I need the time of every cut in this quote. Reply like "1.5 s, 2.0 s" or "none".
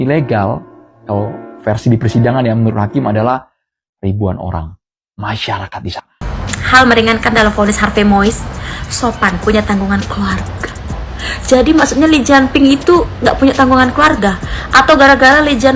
6.2 s